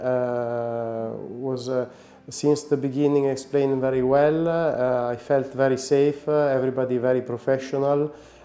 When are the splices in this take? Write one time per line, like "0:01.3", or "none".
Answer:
none